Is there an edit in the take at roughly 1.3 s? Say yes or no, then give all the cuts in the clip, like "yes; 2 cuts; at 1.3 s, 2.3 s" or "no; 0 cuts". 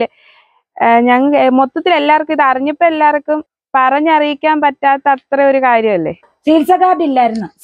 no; 2 cuts; at 3.5 s, 6.2 s